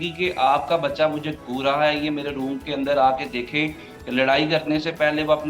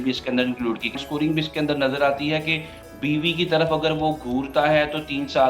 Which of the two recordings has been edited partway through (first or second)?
second